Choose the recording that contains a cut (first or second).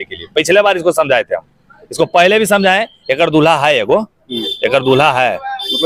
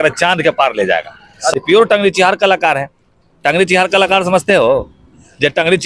second